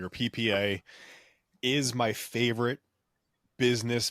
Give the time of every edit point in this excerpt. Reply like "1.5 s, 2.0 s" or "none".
none